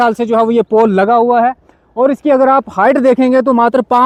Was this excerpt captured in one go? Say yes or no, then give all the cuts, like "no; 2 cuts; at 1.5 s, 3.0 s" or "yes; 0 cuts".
yes; 0 cuts